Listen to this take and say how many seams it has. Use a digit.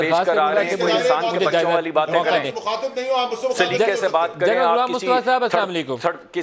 0